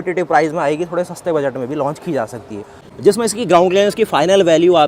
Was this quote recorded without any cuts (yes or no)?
no